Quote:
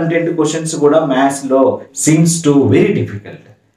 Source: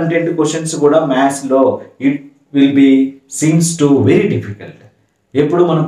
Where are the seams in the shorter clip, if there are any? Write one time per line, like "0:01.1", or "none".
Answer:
0:01.9